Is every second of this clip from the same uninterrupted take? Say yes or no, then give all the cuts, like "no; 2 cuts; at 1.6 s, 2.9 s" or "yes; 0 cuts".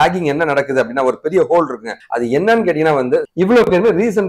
no; 1 cut; at 3.3 s